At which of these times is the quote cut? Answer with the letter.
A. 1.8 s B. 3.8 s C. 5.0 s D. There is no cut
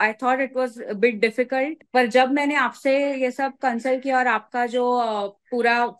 A